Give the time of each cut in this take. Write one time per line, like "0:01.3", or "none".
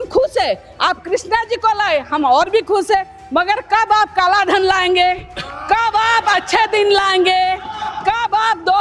none

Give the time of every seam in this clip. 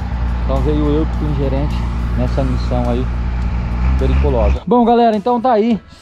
0:04.5

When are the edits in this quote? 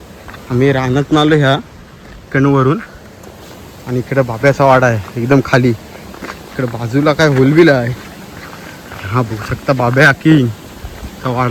none

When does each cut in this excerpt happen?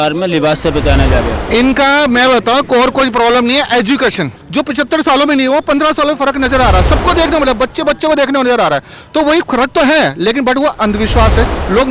0:01.4
0:04.4

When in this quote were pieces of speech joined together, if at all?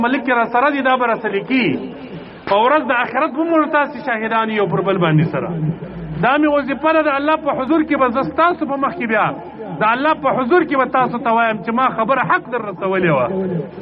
none

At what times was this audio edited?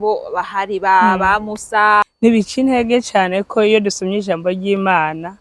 0:02.1

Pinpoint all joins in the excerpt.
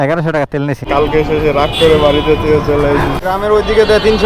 0:03.2

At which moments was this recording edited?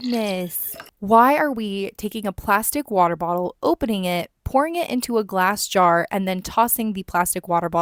none

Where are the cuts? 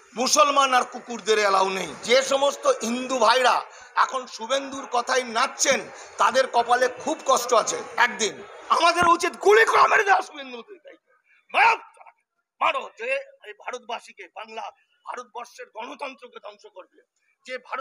0:02.0
0:08.5

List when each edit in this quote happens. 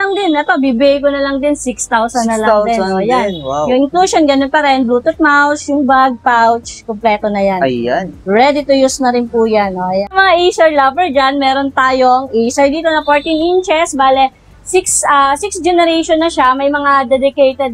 0:10.1

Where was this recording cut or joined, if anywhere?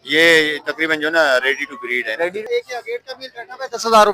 0:02.4

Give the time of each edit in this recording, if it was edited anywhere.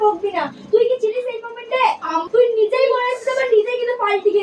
0:02.3

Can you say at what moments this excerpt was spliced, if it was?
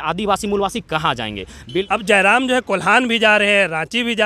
0:01.9

